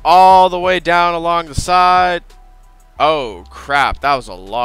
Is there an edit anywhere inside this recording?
no; 0 cuts

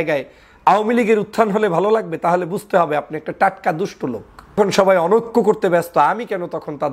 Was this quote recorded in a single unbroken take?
no; 1 cut; at 4.5 s

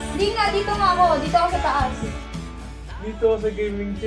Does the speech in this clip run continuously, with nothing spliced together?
yes; 0 cuts

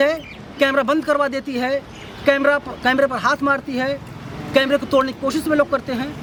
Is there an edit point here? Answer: no; 0 cuts

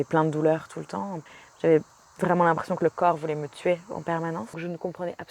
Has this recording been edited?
yes; 2 cuts; at 1.2 s, 4.6 s

